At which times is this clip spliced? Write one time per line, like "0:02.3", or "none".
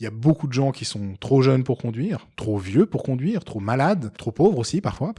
0:04.2

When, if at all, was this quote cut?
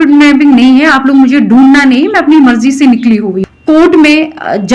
0:03.5

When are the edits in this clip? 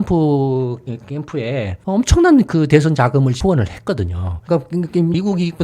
0:04.3

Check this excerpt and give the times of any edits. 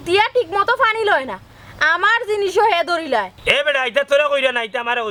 none

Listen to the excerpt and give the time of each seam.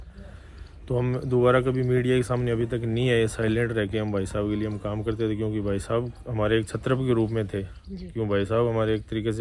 none

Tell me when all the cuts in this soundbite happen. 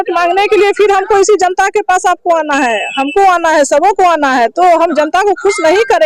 none

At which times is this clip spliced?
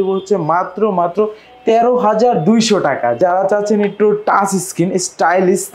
0:03.2

